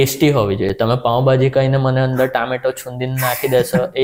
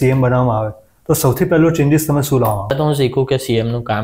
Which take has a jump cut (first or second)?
second